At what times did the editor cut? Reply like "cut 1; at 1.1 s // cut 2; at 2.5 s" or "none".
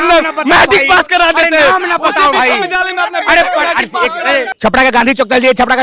cut 1; at 4.5 s